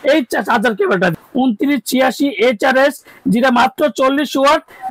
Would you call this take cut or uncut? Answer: cut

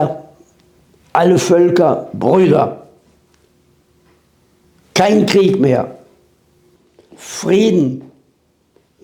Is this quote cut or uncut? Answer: uncut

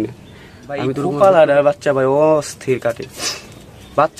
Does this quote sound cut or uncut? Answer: cut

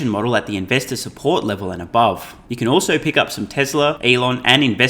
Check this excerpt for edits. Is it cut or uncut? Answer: cut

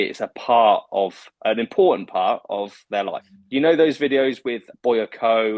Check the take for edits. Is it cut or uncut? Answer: cut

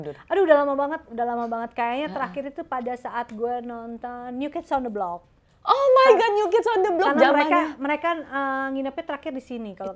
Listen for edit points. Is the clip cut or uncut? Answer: uncut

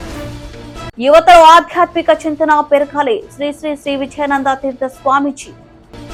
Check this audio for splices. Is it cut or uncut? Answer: uncut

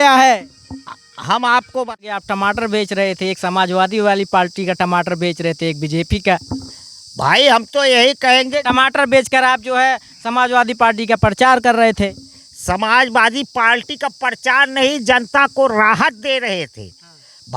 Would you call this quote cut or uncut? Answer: cut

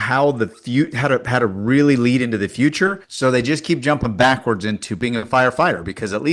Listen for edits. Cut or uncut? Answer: cut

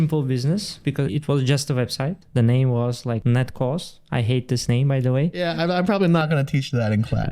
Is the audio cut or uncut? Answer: cut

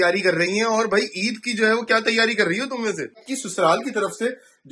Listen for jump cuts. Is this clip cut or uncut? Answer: cut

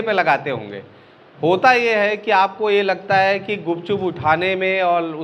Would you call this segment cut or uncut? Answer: uncut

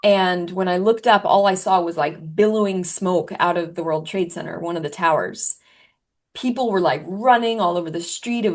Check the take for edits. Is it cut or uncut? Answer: uncut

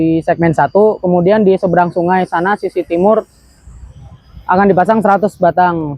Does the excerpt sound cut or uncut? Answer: uncut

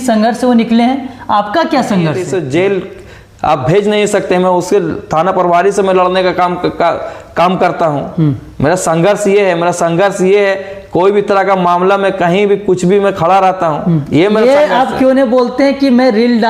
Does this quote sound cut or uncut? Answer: cut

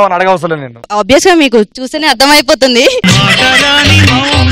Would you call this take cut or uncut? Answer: uncut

